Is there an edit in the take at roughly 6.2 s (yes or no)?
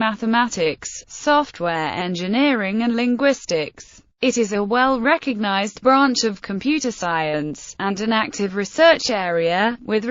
no